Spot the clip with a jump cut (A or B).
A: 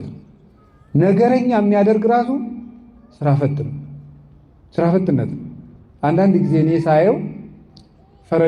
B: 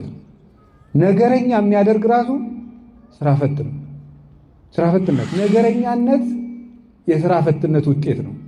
B